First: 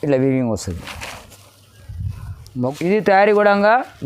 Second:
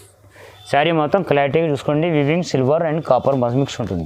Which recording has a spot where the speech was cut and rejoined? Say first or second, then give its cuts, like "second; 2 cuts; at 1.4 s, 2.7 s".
first; 1 cut; at 2.6 s